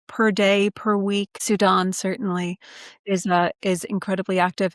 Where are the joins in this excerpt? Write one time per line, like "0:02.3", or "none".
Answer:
none